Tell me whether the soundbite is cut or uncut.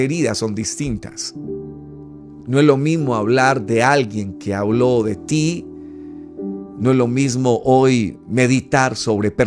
uncut